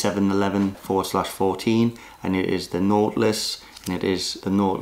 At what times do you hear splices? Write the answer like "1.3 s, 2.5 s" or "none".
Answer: none